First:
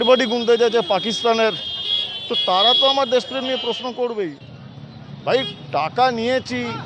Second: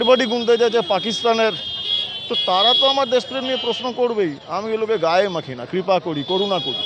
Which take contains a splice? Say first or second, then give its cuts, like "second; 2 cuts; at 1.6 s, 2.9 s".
first; 1 cut; at 4.4 s